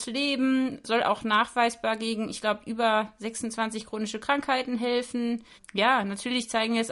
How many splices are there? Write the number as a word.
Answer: two